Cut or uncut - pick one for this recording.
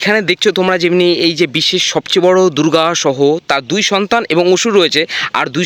uncut